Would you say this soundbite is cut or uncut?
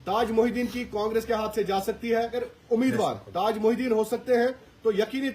cut